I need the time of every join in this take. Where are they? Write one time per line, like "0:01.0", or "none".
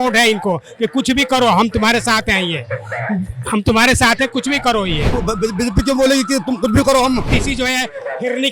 0:05.1
0:07.3